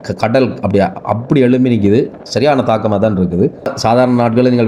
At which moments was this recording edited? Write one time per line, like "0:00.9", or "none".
0:03.7